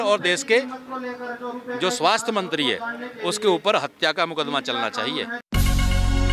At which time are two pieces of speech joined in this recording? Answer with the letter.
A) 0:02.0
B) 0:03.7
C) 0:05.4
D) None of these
C